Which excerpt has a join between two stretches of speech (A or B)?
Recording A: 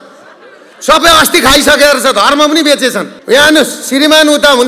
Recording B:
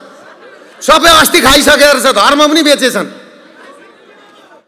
A